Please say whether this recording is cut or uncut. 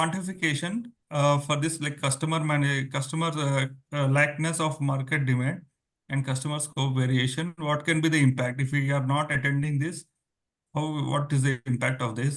uncut